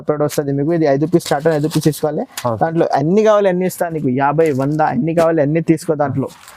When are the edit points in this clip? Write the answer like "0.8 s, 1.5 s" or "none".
none